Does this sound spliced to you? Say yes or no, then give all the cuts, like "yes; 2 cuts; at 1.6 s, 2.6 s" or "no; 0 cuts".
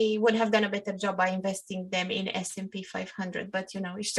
no; 0 cuts